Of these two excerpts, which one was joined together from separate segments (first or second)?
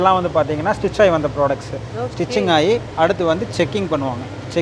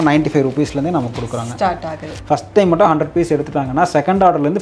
second